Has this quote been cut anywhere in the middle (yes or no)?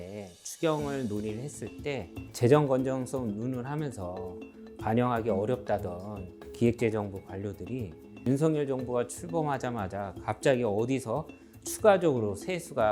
no